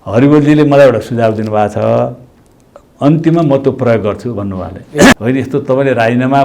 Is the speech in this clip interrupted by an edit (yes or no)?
yes